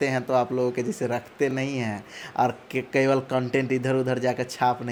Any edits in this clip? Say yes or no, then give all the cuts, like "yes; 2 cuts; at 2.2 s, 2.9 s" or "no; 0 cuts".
no; 0 cuts